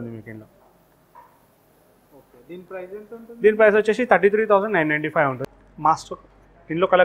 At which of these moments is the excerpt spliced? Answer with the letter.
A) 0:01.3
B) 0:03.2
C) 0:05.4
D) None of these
C